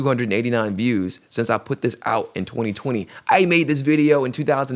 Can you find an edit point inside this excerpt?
no; 0 cuts

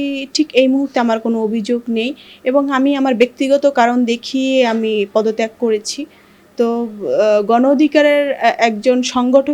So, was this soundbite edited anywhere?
no; 0 cuts

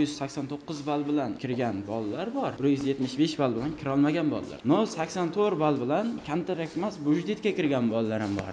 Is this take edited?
yes; 3 cuts; at 1.4 s, 2.5 s, 4.5 s

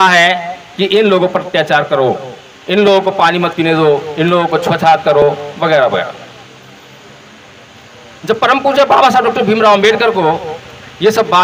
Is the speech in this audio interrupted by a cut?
no; 0 cuts

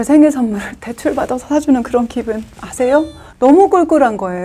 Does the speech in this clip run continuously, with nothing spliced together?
no; 1 cut; at 3.2 s

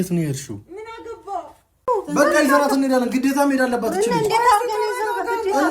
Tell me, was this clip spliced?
yes; 1 cut; at 1.8 s

